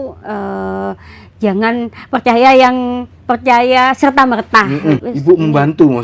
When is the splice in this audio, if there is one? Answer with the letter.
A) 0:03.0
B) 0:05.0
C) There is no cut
B